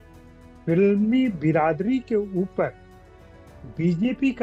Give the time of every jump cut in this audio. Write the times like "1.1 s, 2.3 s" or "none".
none